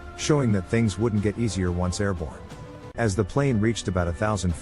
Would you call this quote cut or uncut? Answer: cut